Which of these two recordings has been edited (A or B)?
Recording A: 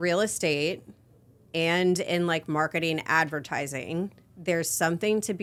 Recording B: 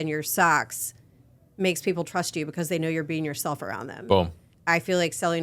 B